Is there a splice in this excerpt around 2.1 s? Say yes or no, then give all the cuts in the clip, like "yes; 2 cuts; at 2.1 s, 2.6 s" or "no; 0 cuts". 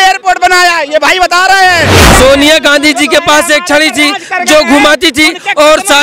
yes; 1 cut; at 2.1 s